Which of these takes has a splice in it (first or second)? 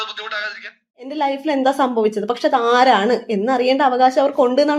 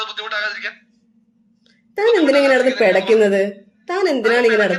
first